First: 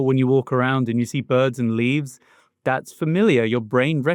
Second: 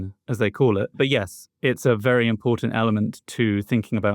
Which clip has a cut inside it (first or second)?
second